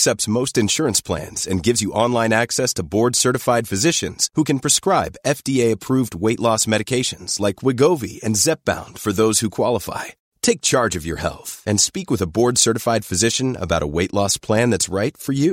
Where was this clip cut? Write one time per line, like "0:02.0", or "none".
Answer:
none